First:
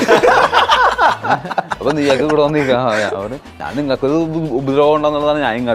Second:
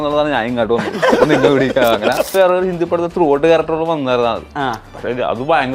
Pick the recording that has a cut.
second; 1 cut; at 2.3 s

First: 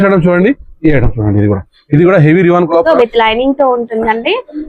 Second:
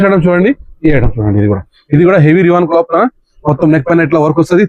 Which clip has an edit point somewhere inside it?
first; 1 cut; at 2.8 s

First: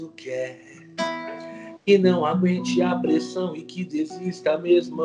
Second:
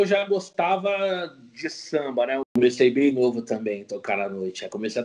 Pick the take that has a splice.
second; 1 cut; at 2.5 s

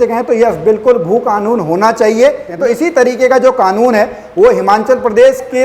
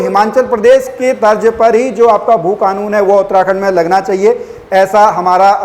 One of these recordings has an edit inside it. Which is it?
first; 1 cut; at 2.5 s

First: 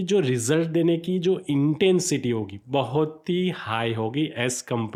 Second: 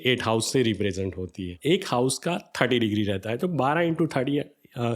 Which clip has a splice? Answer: second; 1 cut; at 1.5 s

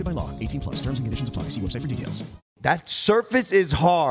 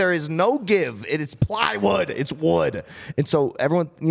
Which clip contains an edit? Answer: first; 1 cut; at 2.6 s

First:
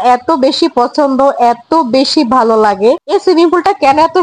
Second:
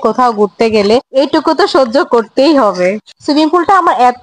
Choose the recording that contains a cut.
second; 1 cut; at 3.0 s

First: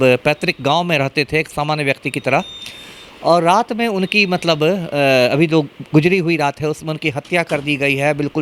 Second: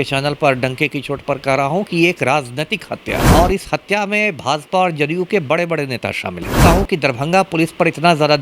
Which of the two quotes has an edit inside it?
second; 2 cuts; at 3.2 s, 6.6 s

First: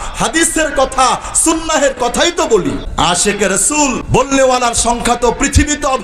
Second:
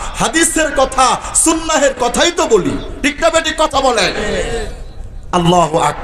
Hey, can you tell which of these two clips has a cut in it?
first; 2 cuts; at 2.9 s, 4.0 s

